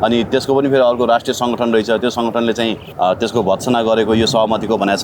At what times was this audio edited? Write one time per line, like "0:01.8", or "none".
0:02.9